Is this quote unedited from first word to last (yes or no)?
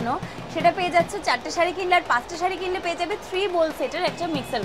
yes